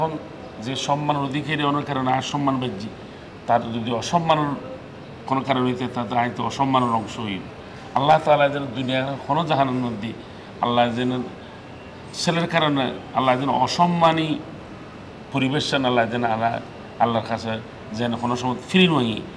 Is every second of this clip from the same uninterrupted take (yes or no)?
yes